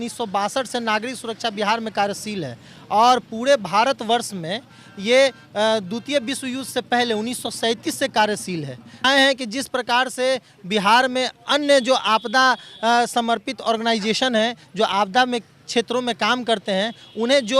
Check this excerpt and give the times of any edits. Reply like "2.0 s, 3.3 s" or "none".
8.9 s